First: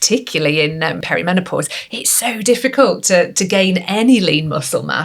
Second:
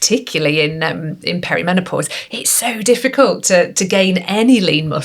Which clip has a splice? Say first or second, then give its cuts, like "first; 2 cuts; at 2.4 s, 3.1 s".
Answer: first; 1 cut; at 1.0 s